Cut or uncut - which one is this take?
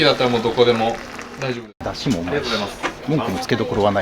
cut